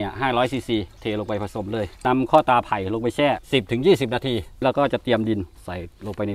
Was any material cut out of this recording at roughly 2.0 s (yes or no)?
yes